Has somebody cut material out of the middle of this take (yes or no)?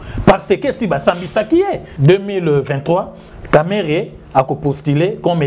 yes